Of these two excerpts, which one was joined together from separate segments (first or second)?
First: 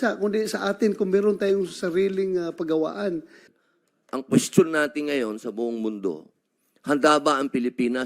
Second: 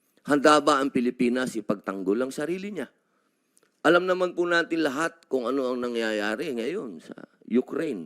first